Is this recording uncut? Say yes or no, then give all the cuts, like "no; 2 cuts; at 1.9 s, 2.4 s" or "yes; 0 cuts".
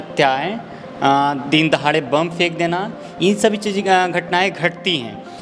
yes; 0 cuts